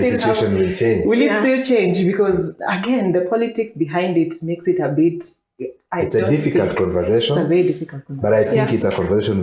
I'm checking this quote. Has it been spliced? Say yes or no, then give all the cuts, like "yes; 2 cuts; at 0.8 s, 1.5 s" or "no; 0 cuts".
no; 0 cuts